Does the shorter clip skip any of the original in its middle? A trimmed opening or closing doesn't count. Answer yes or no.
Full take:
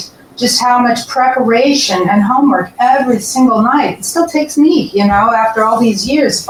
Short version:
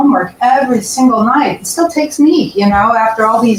no